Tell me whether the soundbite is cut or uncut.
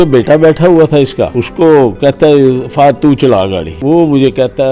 cut